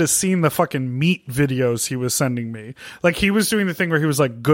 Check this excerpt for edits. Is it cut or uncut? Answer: cut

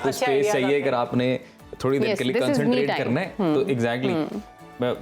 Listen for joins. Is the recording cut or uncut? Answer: uncut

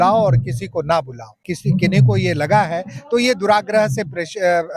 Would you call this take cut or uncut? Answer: cut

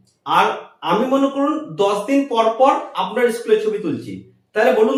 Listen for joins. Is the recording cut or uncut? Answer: uncut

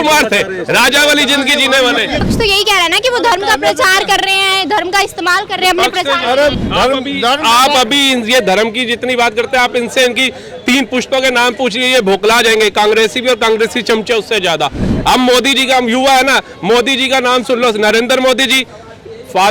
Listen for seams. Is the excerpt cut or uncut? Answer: cut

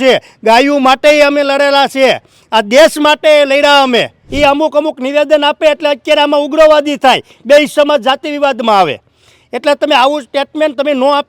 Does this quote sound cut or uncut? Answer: cut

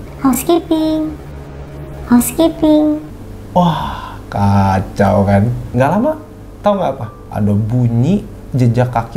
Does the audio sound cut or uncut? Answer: cut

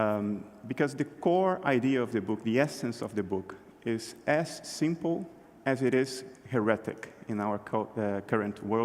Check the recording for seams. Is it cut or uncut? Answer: cut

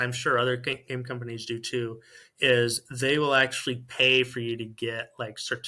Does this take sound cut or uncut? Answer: uncut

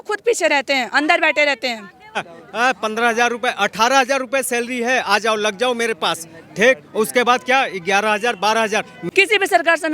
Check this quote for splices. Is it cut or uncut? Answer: cut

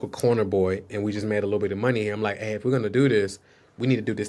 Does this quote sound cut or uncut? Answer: uncut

